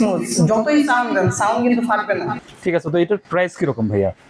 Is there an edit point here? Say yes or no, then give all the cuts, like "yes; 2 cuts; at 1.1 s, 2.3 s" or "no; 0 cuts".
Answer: yes; 1 cut; at 2.4 s